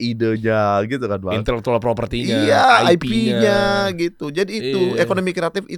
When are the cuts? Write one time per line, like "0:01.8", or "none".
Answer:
none